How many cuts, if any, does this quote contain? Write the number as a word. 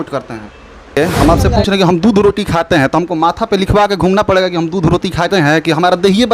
one